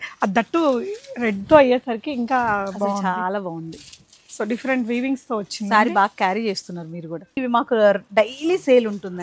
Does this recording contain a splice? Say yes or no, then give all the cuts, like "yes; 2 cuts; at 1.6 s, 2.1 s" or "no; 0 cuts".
yes; 1 cut; at 7.4 s